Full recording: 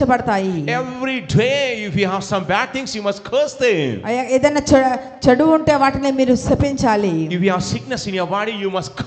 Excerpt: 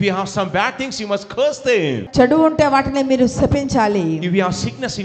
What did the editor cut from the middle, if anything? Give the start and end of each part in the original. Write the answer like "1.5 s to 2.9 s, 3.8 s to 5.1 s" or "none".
4.0 s to 5.1 s